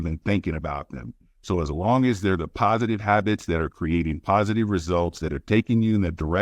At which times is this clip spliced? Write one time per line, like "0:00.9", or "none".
0:03.0